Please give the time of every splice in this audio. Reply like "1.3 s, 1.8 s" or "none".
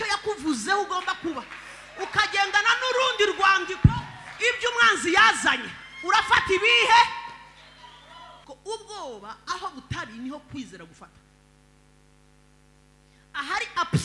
8.3 s